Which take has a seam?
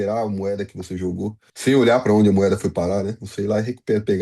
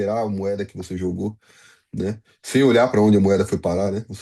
first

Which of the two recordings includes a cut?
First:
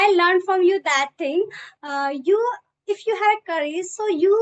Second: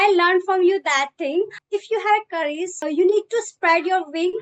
second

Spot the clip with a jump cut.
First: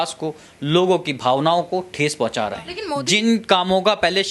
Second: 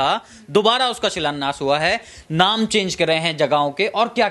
first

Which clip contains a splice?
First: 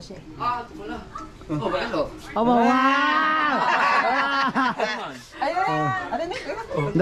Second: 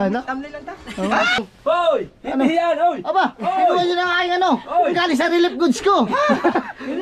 second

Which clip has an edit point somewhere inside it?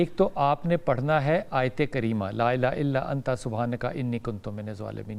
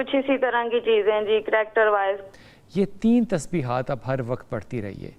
second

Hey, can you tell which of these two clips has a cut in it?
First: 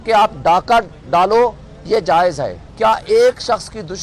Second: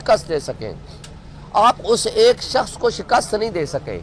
first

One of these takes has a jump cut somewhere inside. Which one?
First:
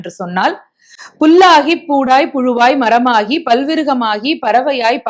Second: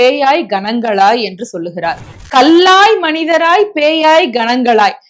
second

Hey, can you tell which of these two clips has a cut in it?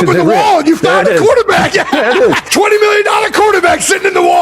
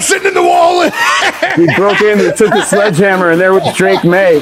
first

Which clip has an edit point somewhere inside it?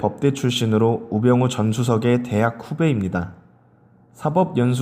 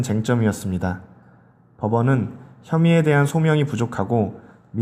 first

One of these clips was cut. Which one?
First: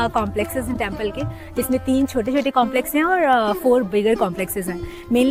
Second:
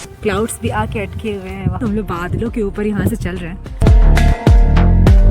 second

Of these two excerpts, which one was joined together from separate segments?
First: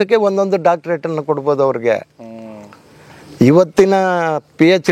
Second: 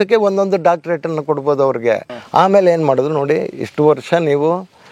second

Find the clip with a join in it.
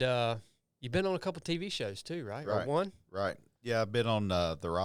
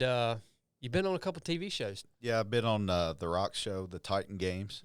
second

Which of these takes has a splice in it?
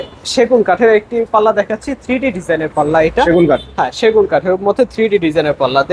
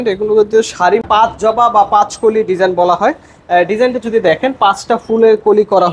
second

